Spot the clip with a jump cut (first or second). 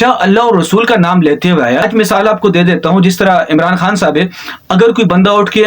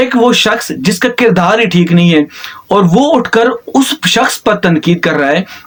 first